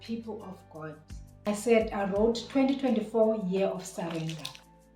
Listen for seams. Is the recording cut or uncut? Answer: cut